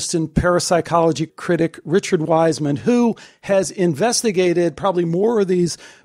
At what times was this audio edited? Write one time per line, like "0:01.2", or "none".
none